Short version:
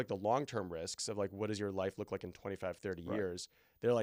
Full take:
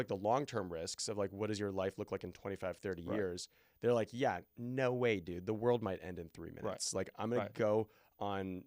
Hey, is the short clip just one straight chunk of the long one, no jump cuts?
yes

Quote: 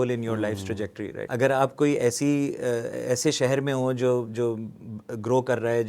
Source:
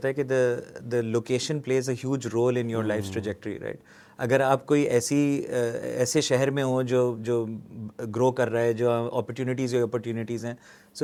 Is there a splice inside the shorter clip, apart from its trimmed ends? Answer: yes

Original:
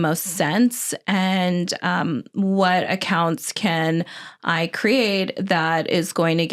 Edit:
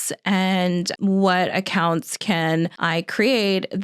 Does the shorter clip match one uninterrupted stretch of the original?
no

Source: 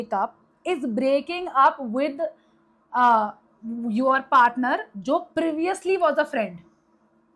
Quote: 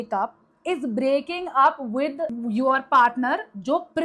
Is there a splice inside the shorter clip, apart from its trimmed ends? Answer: yes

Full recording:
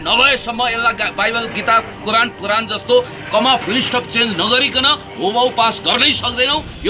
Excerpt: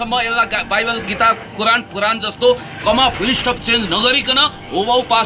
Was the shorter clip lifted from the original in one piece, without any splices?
yes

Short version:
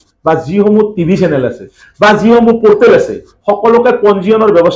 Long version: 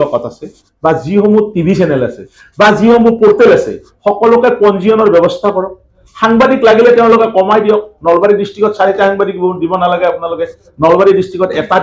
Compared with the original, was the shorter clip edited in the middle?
no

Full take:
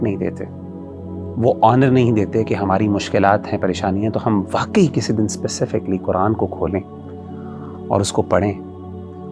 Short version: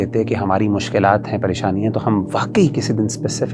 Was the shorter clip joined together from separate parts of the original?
no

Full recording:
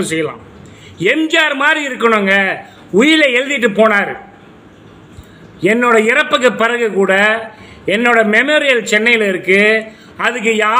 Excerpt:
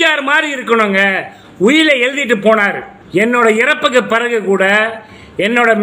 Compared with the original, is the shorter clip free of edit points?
no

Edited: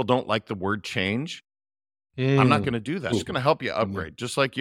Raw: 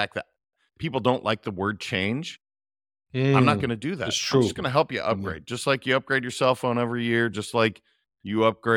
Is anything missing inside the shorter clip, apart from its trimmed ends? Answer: yes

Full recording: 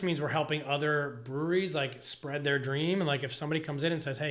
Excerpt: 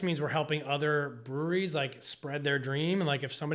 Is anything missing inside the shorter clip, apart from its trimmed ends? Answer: no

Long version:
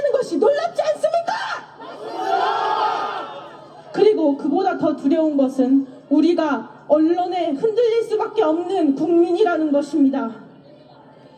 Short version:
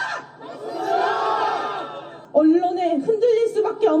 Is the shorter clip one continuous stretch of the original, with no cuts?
no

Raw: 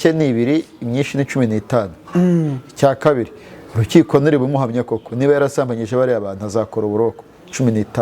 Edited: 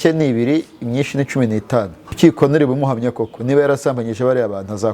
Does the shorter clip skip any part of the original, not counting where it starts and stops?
yes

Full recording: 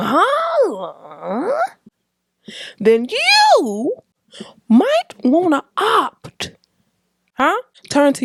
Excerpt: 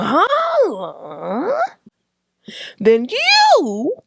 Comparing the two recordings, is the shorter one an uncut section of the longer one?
yes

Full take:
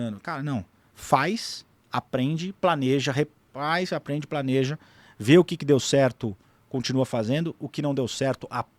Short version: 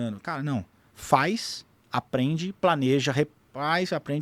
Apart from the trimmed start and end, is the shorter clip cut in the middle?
no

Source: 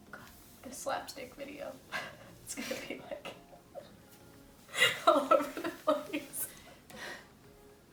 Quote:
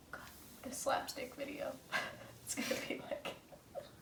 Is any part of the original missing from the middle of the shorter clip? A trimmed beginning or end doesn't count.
no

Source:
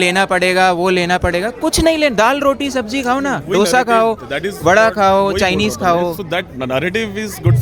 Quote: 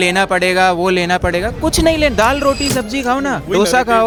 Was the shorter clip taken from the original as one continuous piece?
yes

